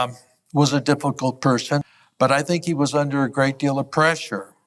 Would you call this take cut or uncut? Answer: cut